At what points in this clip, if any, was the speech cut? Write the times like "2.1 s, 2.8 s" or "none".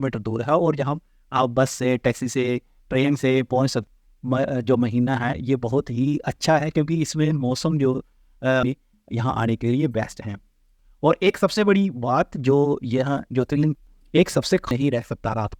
3.9 s, 8.6 s, 13.8 s, 14.7 s

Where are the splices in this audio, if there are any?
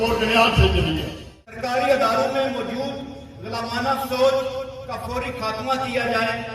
1.6 s

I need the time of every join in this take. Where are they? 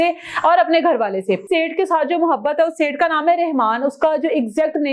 1.4 s

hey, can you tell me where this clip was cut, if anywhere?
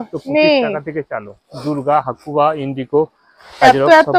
none

